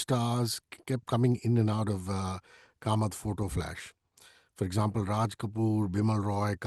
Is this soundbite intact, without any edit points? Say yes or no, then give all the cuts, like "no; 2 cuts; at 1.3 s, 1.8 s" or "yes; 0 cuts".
yes; 0 cuts